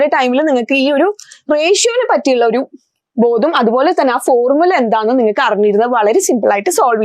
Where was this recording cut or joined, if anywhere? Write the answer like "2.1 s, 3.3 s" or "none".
none